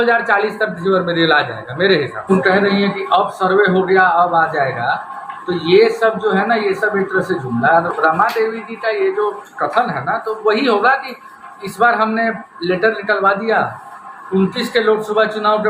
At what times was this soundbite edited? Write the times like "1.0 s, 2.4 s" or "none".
2.3 s, 7.9 s